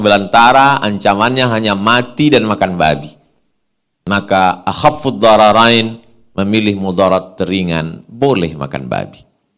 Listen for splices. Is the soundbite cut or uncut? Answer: uncut